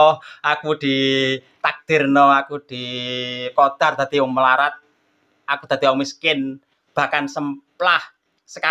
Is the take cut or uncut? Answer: uncut